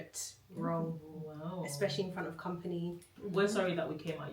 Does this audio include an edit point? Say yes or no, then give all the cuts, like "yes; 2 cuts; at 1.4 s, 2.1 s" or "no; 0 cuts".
yes; 1 cut; at 3.1 s